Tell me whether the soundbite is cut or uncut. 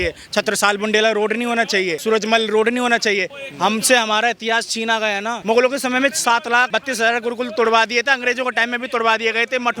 cut